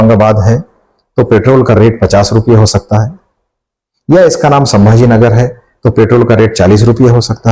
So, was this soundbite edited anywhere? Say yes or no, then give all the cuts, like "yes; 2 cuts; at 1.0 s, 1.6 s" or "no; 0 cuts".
no; 0 cuts